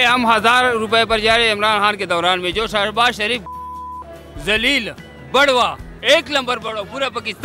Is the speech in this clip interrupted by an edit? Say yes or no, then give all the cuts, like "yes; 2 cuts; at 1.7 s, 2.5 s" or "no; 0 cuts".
no; 0 cuts